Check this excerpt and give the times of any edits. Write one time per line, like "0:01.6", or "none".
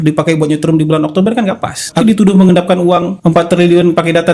0:02.0